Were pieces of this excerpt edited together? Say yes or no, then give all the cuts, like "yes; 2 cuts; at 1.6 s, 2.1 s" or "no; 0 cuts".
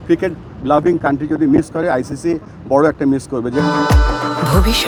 no; 0 cuts